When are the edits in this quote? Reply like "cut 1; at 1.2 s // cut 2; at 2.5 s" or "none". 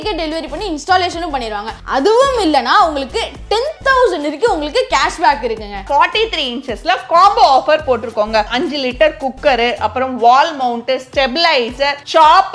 cut 1; at 5.8 s // cut 2; at 8.5 s